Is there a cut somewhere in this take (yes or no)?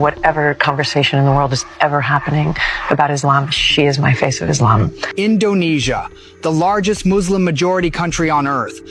yes